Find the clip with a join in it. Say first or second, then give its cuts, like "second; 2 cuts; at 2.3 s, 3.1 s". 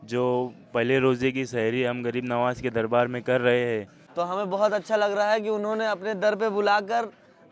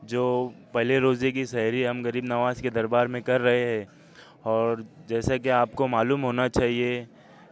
first; 1 cut; at 4.0 s